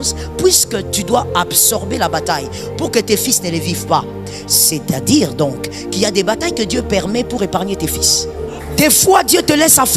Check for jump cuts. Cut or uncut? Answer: cut